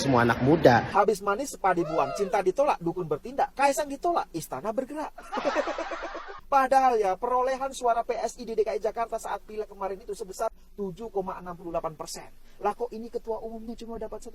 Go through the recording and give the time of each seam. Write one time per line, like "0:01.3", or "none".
0:00.9
0:06.3